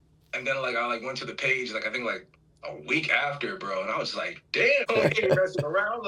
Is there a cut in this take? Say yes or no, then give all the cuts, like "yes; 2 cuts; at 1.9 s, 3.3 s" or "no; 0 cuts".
yes; 1 cut; at 4.9 s